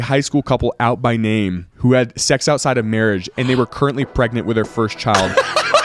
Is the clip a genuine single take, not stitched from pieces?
yes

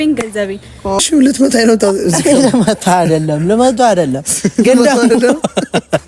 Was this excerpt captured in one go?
no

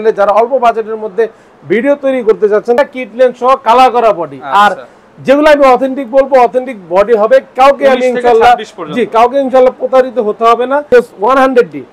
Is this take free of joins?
no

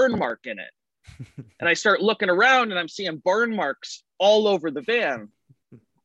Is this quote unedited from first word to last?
yes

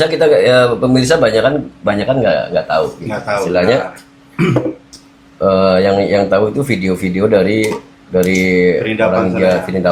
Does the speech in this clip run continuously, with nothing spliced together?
yes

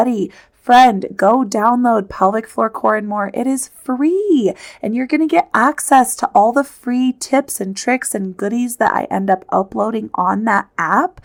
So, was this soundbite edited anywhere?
no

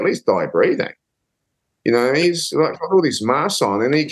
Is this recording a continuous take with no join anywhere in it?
yes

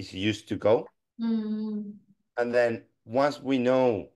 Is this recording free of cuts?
no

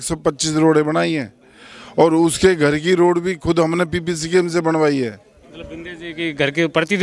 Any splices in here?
no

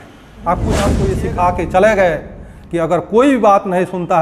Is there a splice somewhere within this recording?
yes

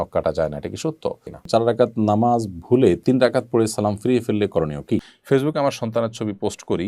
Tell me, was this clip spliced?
yes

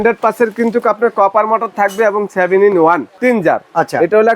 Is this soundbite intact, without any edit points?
no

